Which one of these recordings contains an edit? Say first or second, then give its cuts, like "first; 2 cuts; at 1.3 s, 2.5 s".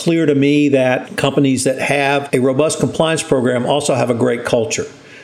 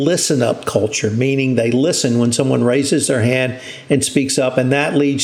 first; 2 cuts; at 1.1 s, 2.2 s